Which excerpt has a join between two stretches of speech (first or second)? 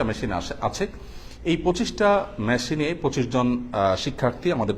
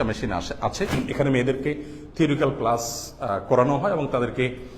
second